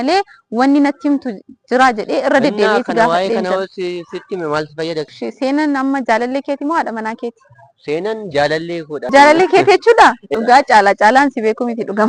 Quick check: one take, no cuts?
no; 3 cuts; at 5.1 s, 9.1 s, 10.2 s

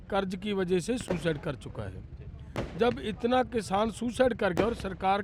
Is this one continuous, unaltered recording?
yes; 0 cuts

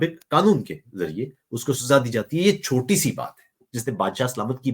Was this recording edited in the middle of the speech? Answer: yes; 1 cut; at 3.6 s

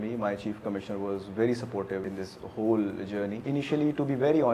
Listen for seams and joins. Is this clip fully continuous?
no; 2 cuts; at 2.0 s, 3.4 s

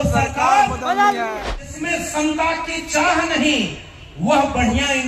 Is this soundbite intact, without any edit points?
no; 1 cut; at 1.3 s

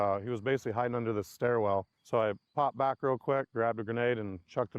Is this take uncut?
no; 1 cut; at 2.0 s

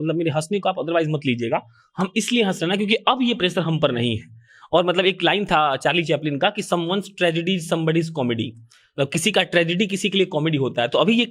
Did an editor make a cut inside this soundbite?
no; 0 cuts

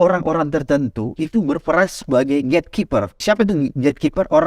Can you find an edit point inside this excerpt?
yes; 1 cut; at 3.2 s

